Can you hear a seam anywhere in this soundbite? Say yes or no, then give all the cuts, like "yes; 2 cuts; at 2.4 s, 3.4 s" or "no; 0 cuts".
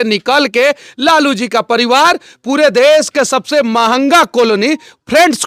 no; 0 cuts